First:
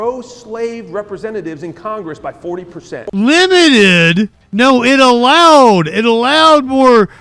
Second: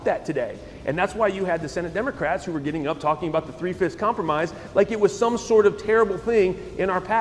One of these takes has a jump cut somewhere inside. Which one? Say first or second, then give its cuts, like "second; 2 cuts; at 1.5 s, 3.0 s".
first; 2 cuts; at 3.1 s, 4.4 s